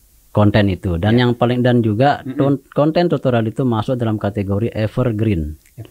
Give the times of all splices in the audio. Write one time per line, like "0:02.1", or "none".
none